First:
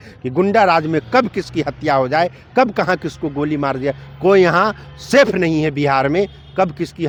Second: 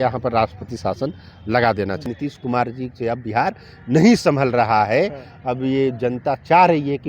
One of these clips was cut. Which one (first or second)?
second